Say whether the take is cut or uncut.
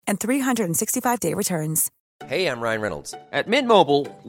cut